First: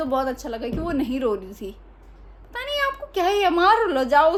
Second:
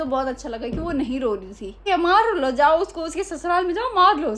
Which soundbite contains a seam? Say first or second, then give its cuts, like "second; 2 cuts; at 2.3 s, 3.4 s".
second; 1 cut; at 1.9 s